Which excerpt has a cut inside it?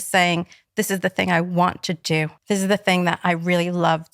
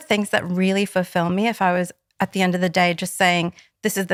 first; 1 cut; at 2.3 s

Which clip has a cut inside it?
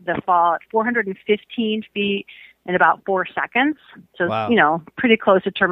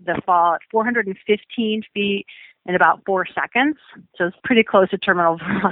second; 1 cut; at 4.3 s

